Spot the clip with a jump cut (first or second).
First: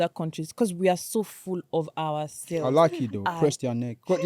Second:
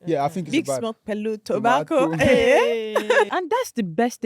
second